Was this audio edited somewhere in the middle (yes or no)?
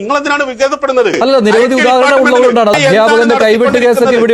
yes